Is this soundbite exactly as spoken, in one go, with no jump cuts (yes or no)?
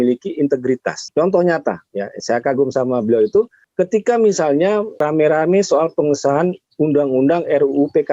no